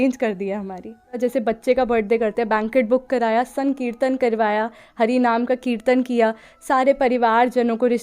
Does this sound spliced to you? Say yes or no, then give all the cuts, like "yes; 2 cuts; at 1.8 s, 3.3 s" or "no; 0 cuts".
yes; 1 cut; at 1.2 s